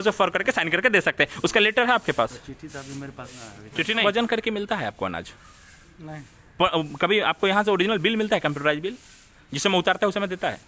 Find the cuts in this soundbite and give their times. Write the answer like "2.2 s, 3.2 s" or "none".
4.0 s